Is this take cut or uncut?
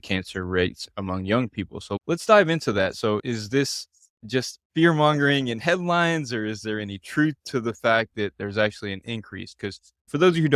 uncut